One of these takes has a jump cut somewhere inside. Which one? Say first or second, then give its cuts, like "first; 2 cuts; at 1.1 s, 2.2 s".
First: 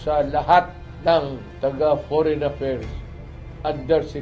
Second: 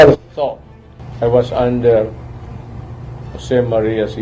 first; 1 cut; at 1.4 s